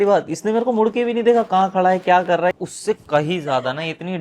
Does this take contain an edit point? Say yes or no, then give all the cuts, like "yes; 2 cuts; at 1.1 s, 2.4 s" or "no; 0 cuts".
yes; 1 cut; at 2.6 s